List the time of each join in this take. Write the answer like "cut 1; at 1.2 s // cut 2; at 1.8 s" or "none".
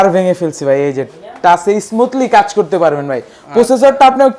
none